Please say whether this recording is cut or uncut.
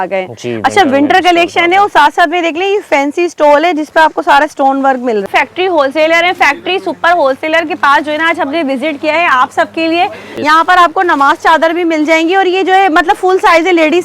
cut